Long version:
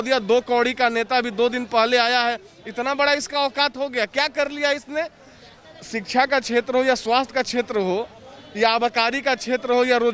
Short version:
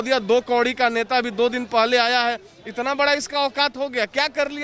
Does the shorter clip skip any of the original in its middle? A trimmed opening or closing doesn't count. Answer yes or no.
no